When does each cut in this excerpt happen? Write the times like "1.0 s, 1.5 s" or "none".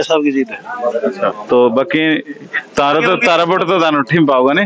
1.3 s